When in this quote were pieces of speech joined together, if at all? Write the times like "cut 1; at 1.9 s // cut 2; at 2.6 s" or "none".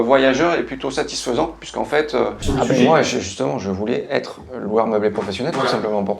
cut 1; at 2.4 s